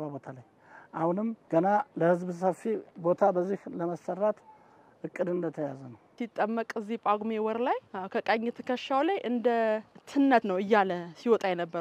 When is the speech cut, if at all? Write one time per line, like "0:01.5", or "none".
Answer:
0:01.4
0:02.9
0:06.1
0:07.9
0:10.4